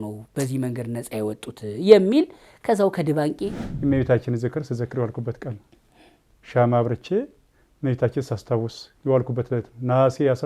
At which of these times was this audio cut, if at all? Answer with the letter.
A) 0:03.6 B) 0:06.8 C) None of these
A